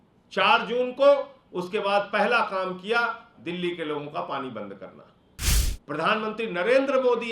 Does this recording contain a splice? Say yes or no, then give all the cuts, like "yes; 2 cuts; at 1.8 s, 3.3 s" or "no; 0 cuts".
yes; 1 cut; at 5.7 s